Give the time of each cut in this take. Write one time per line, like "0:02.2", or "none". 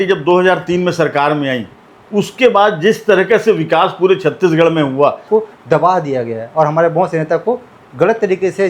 0:05.2